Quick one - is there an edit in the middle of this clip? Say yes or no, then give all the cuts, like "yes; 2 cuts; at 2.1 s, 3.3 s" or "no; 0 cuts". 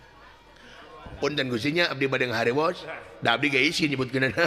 no; 0 cuts